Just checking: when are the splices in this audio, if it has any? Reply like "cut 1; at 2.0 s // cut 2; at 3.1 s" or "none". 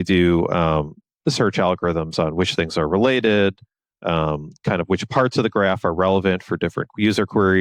none